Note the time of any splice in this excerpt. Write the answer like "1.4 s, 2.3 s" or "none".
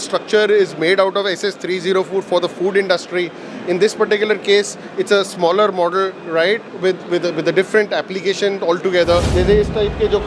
9.3 s